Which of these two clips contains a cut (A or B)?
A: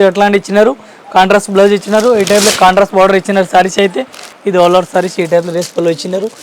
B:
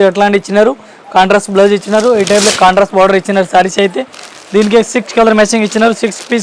A